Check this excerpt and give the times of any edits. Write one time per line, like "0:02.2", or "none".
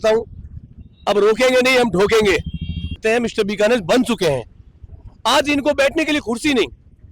0:03.0

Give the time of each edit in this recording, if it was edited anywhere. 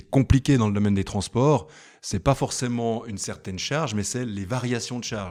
none

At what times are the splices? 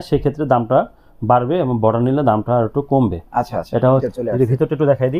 0:04.1

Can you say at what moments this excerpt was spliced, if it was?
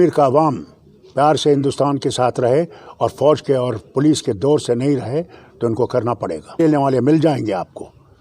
0:06.6

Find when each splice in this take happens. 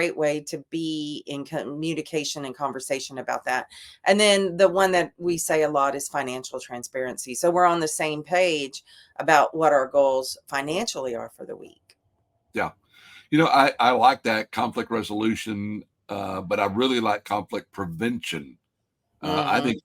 none

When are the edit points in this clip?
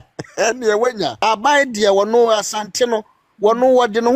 0:01.2

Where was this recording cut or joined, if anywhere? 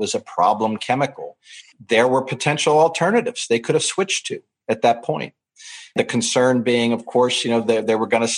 0:01.7
0:05.9

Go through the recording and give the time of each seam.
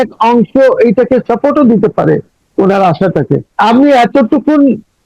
0:03.5

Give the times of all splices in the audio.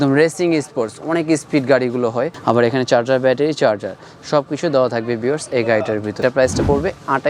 0:02.3
0:06.2

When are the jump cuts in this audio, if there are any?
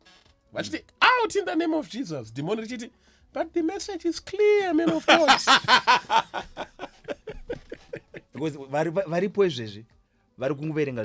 0:08.2

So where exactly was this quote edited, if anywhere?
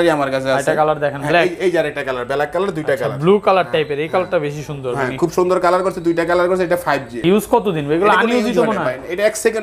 0:07.2

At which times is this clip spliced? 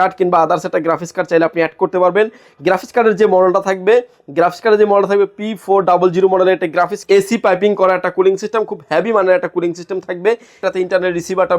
0:07.0
0:10.7

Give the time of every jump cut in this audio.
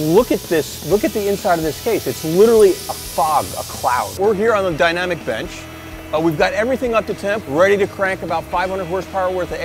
0:04.1
0:07.4

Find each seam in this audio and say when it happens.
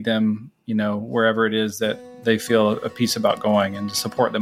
0:02.1

